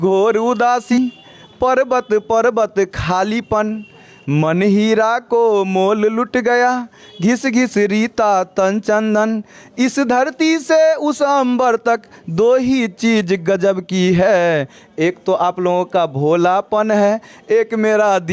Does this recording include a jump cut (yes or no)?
yes